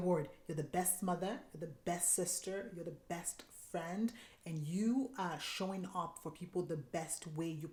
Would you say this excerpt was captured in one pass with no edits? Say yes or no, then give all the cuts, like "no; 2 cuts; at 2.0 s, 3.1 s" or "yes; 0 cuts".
yes; 0 cuts